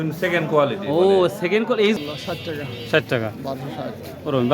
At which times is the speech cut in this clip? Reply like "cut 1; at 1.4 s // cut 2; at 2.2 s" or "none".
cut 1; at 2.0 s